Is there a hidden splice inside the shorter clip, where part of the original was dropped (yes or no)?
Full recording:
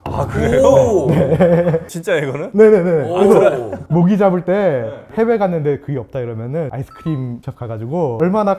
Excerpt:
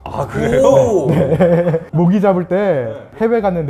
yes